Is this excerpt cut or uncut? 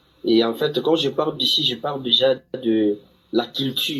uncut